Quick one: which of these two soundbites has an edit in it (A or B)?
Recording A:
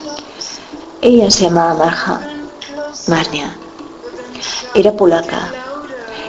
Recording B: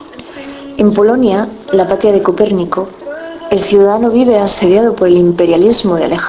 B